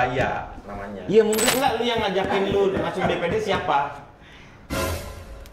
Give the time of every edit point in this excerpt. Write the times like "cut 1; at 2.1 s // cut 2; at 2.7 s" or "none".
cut 1; at 1.5 s

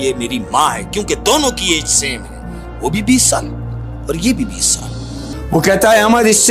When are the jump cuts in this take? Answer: cut 1; at 5.3 s

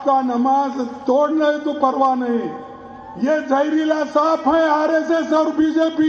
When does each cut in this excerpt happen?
cut 1; at 2.0 s

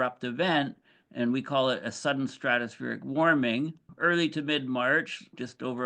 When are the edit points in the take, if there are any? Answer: cut 1; at 3.8 s

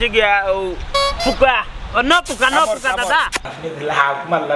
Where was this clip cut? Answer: cut 1; at 3.4 s

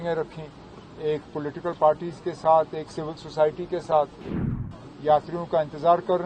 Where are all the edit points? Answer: cut 1; at 4.6 s

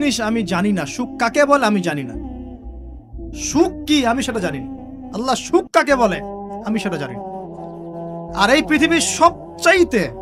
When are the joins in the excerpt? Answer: none

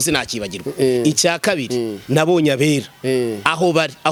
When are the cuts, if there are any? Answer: none

